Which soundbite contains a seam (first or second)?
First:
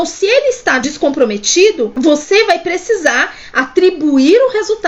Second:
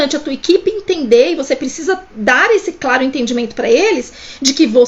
first